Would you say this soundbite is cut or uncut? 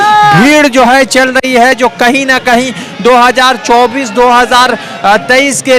uncut